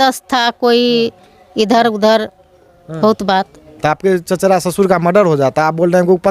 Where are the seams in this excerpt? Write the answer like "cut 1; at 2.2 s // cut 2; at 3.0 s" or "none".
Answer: cut 1; at 3.8 s